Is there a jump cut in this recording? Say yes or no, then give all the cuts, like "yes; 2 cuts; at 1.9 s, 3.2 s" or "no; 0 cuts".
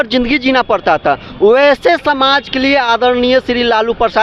no; 0 cuts